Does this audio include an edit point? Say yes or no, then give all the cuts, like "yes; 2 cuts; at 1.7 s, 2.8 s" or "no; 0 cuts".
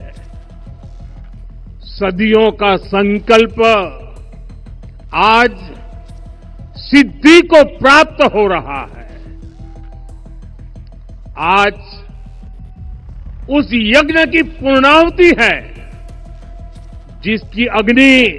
no; 0 cuts